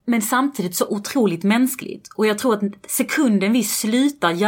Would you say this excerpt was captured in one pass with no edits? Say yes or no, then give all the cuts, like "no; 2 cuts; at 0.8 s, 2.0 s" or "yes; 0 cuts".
yes; 0 cuts